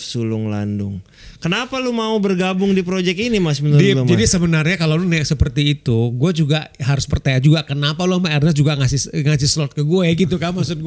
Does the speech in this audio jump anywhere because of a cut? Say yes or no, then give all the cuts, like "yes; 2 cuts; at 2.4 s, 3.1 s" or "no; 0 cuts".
no; 0 cuts